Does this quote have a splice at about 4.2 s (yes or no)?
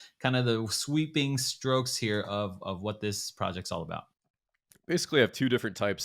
yes